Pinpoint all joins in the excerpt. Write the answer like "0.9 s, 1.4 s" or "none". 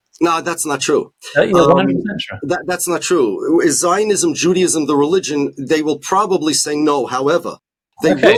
none